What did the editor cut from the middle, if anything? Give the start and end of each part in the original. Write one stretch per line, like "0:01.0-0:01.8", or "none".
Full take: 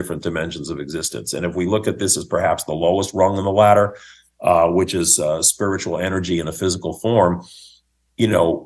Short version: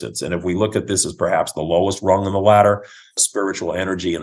0:04.3-0:05.5